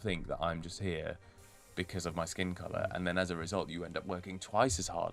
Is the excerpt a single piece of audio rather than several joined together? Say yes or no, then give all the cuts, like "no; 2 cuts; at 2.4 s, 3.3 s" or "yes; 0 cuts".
yes; 0 cuts